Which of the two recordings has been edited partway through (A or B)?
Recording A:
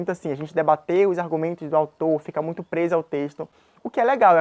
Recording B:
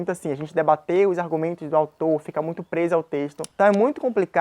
B